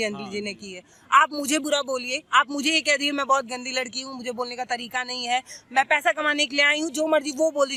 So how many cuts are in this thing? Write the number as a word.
zero